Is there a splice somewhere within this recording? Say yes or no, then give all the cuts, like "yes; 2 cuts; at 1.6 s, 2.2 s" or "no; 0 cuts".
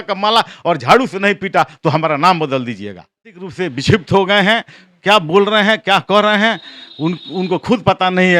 yes; 1 cut; at 3.5 s